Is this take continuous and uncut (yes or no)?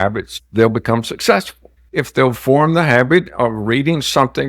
no